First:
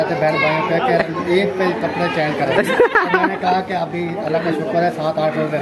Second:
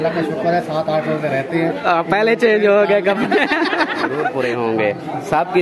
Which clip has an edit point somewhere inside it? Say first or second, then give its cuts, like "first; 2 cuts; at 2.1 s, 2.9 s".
second; 1 cut; at 4.2 s